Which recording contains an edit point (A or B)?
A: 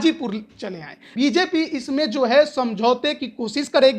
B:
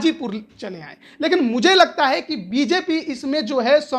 A